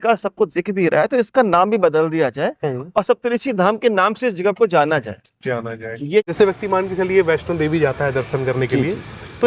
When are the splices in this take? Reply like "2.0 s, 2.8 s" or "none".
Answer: 6.3 s